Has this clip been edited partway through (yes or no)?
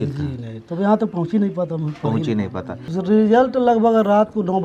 yes